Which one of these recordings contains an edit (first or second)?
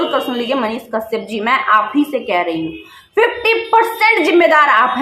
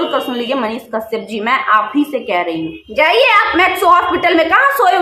second